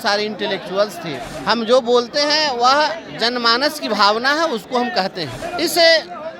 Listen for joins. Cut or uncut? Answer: cut